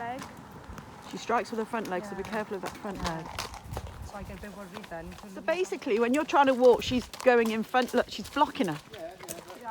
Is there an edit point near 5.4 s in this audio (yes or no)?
yes